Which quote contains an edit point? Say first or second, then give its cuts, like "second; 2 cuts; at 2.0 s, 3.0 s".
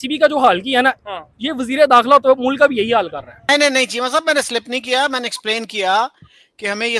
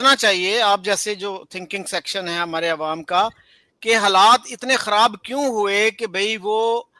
first; 1 cut; at 3.3 s